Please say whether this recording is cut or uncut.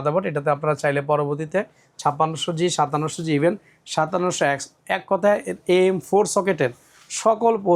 uncut